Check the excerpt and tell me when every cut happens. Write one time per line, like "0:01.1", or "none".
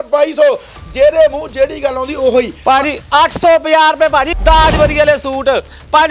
0:04.3